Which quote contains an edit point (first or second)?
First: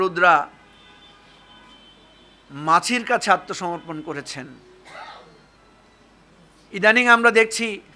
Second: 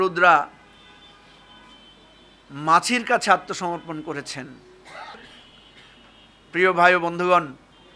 second